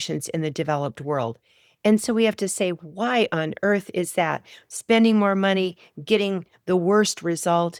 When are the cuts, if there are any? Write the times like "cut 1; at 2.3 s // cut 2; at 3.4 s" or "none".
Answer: none